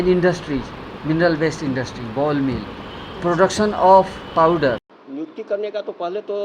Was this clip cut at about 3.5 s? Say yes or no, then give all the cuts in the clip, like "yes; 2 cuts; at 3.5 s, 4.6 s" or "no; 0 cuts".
no; 1 cut; at 5.0 s